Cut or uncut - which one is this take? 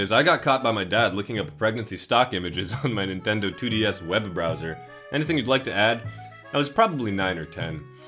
uncut